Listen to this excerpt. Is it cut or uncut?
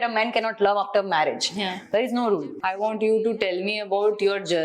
cut